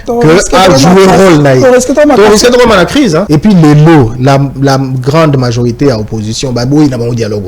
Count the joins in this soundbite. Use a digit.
1